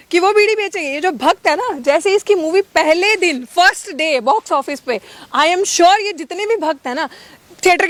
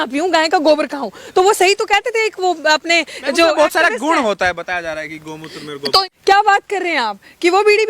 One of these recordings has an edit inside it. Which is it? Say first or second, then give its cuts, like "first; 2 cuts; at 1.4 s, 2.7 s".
second; 1 cut; at 6.0 s